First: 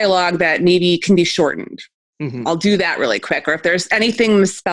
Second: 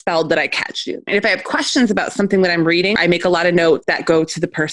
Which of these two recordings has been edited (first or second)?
second